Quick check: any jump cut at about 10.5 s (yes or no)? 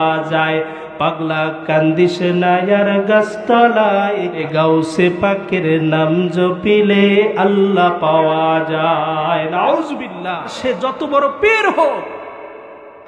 yes